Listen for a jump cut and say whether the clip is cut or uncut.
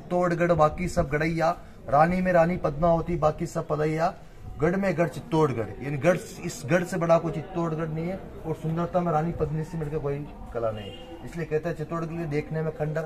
uncut